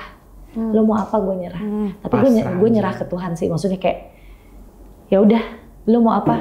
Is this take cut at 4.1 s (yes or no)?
no